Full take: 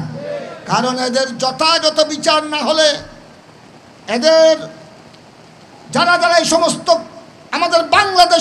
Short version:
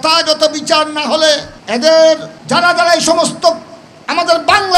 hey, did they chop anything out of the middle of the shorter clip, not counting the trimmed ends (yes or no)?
yes